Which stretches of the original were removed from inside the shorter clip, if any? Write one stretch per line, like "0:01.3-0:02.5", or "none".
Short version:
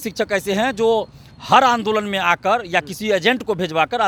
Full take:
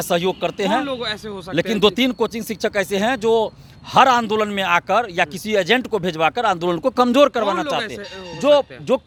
none

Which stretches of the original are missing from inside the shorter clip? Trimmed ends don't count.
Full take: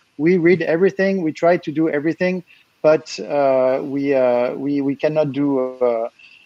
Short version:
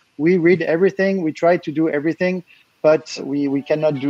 0:03.2-0:04.5

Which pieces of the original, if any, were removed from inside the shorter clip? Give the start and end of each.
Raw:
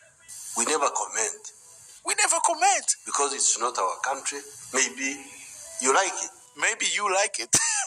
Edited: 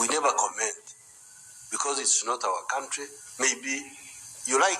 0:02.1-0:02.8

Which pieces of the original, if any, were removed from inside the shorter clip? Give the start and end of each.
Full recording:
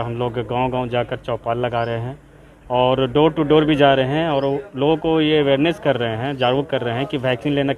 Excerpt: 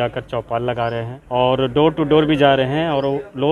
0:02.1-0:02.5

